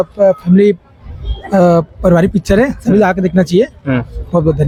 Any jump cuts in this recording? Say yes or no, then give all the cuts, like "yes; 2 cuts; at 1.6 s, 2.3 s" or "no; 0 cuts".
no; 0 cuts